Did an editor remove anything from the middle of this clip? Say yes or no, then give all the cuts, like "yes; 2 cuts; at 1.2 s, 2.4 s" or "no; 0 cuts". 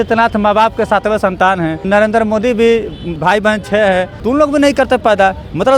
yes; 3 cuts; at 1.8 s, 3.1 s, 4.1 s